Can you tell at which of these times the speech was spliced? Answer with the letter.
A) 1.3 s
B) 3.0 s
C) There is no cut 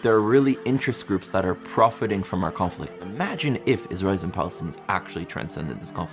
B